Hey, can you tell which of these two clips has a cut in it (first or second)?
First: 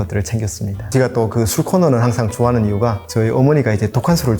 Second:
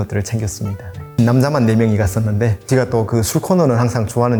first